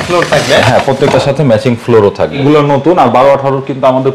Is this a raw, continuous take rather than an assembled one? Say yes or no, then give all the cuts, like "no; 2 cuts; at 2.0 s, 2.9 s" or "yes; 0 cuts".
no; 1 cut; at 2.4 s